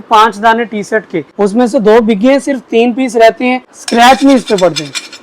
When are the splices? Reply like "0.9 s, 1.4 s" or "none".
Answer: 1.2 s, 3.7 s